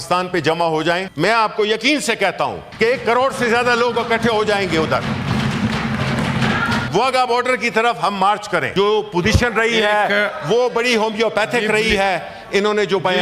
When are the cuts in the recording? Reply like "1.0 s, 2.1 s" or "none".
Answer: 1.1 s, 2.6 s, 6.9 s, 8.7 s